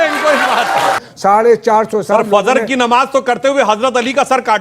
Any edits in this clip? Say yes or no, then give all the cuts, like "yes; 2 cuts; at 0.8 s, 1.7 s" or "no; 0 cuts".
yes; 1 cut; at 1.1 s